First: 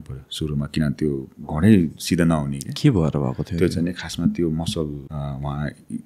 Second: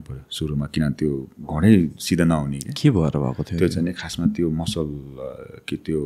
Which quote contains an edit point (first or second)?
first